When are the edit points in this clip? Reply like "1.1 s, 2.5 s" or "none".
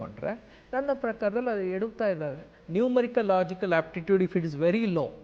2.6 s